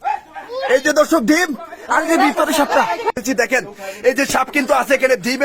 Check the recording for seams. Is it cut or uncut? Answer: cut